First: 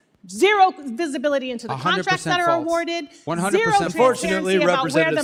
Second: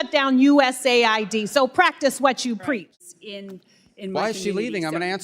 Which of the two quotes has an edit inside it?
second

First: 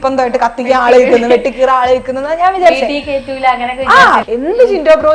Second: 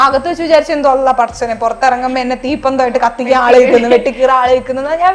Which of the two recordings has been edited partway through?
first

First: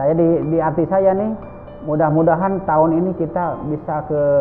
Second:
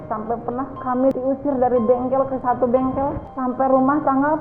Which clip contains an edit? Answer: second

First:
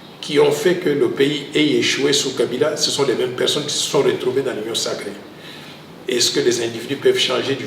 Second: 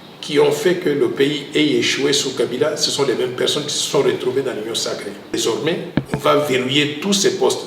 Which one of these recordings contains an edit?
second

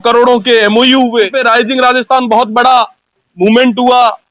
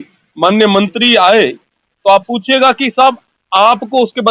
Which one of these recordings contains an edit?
first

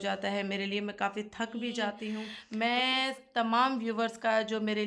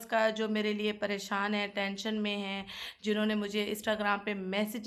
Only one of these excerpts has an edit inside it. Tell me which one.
first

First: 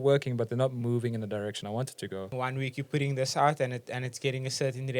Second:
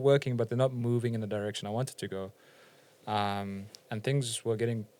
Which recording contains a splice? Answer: first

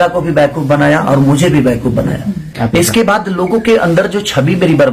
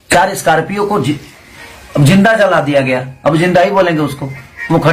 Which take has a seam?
first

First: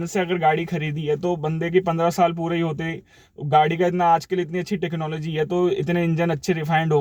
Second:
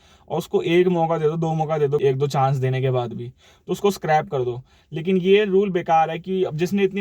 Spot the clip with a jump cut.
second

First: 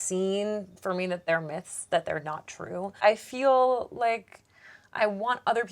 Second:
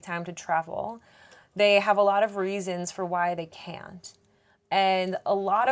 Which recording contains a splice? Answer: first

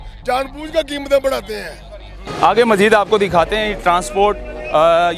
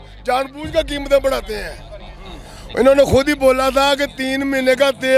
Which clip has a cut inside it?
first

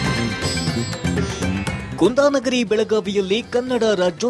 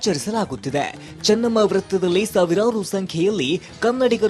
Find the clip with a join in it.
first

